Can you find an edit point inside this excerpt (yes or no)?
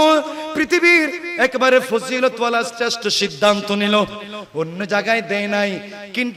no